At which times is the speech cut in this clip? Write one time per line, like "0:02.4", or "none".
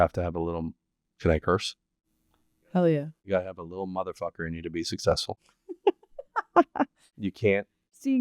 none